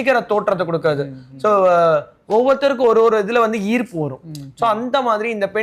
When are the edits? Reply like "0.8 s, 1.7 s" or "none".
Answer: none